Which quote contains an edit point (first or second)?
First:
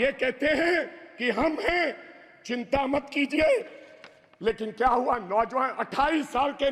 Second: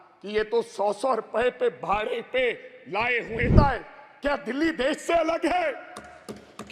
second